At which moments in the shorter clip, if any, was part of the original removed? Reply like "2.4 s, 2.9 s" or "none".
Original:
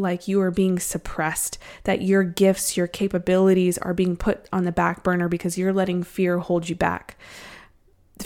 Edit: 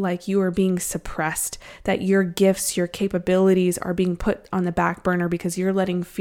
none